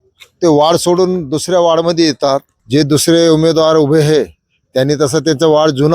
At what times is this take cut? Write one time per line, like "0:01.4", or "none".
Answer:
0:02.5